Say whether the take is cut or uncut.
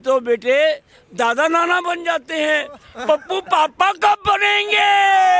uncut